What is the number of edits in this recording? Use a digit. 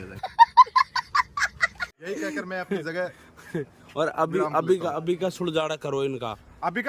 0